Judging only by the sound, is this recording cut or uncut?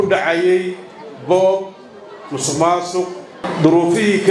cut